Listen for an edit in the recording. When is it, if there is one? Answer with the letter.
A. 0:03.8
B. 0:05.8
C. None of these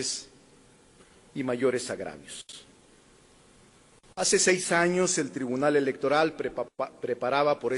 A